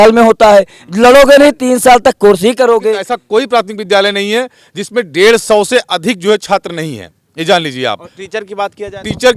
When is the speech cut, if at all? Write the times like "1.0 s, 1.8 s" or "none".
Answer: 3.1 s

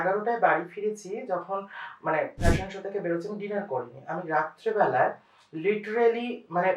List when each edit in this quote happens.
none

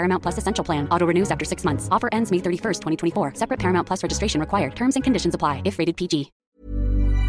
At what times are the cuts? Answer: 6.4 s

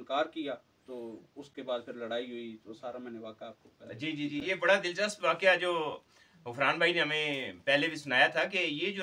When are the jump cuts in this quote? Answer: none

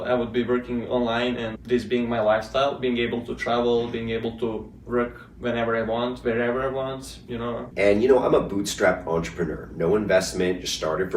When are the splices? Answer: 1.5 s, 7.6 s

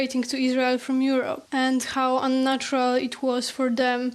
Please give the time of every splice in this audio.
1.4 s

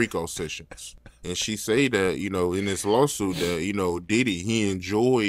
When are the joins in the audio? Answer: none

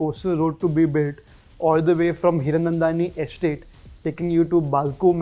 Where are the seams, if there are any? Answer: none

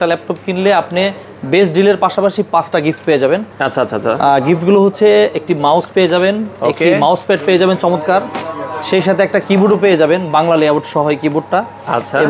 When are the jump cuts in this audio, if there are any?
none

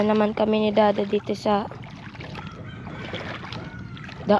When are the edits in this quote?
none

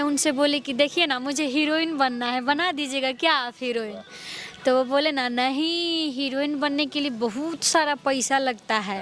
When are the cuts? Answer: none

